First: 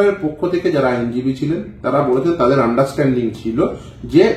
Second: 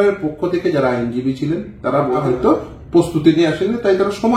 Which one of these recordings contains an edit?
second; 1 cut; at 2.2 s

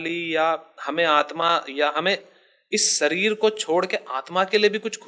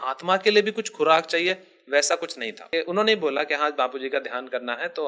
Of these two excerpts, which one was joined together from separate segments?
second; 1 cut; at 2.7 s

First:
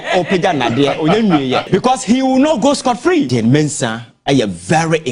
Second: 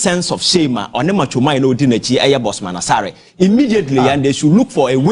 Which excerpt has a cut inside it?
first; 2 cuts; at 1.6 s, 3.3 s

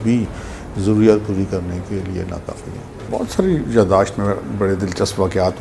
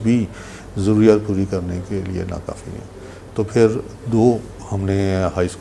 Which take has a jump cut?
first; 1 cut; at 3.1 s

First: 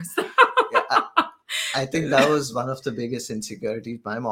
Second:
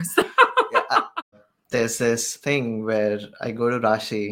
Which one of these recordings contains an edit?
second; 2 cuts; at 1.5 s, 2.3 s

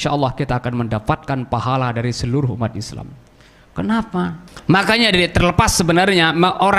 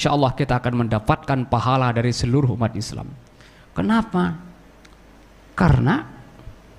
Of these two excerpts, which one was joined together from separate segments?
first; 1 cut; at 4.5 s

